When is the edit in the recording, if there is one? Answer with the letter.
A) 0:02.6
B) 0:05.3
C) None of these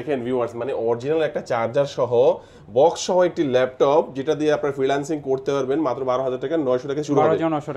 C